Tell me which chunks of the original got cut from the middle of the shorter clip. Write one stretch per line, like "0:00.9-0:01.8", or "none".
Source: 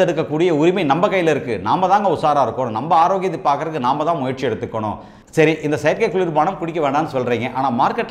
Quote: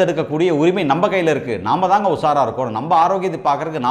none